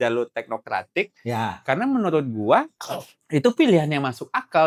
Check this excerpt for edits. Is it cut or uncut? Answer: uncut